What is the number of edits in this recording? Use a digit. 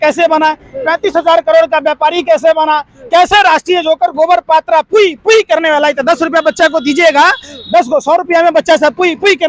0